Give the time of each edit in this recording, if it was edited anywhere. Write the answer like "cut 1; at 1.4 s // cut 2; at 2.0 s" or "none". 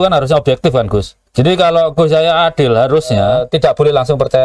cut 1; at 1.2 s // cut 2; at 3.3 s